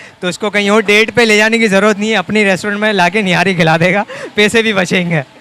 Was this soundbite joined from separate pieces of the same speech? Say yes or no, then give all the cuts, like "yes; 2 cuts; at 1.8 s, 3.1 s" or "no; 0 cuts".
no; 0 cuts